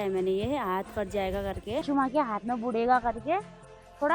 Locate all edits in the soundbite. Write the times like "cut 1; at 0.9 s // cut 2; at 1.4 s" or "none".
cut 1; at 1.8 s